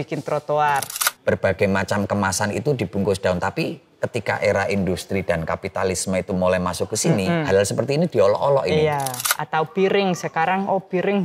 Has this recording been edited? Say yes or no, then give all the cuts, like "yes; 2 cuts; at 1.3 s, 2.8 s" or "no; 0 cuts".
yes; 2 cuts; at 1.0 s, 9.3 s